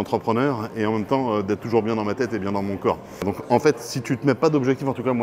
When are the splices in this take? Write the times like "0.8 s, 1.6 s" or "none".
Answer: 3.2 s